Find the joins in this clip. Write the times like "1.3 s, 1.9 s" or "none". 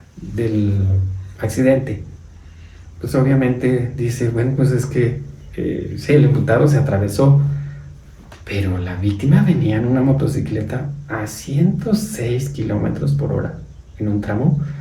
none